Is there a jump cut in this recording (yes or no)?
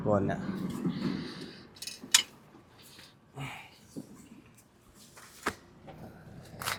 no